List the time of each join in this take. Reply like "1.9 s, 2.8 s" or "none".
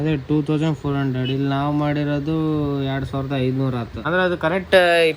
3.9 s